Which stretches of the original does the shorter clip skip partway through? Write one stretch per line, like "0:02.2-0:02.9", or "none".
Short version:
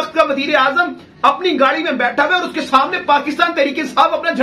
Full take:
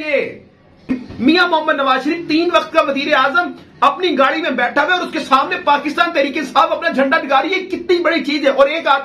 none